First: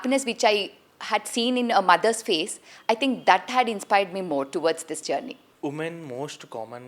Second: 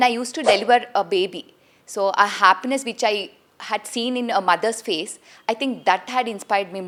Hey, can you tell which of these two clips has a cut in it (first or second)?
first